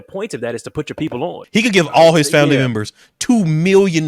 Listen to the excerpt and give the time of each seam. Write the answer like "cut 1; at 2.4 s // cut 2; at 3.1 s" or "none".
cut 1; at 1.4 s